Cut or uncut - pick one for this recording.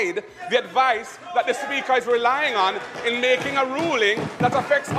uncut